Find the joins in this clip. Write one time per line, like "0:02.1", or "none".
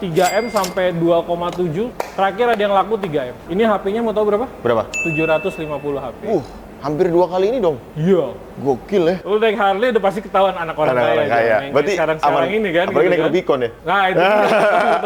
0:02.0
0:03.4
0:09.2
0:13.7